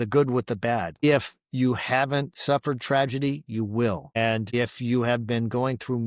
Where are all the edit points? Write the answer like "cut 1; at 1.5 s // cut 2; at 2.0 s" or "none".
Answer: cut 1; at 0.9 s